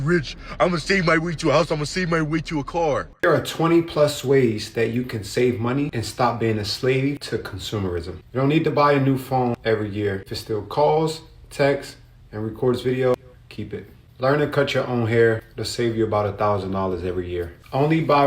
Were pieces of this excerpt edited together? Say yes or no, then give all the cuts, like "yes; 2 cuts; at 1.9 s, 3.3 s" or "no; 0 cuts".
yes; 1 cut; at 3.1 s